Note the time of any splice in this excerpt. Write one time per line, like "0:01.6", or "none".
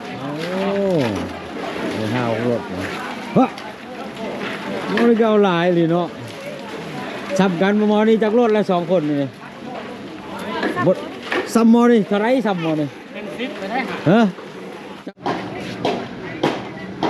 0:14.9